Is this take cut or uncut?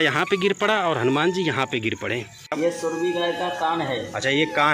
cut